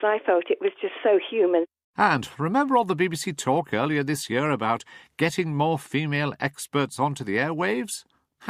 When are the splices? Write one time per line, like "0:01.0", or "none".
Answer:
none